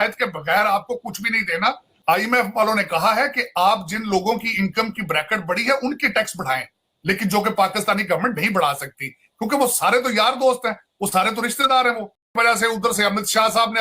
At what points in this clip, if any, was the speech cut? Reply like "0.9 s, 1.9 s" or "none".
1.9 s, 12.2 s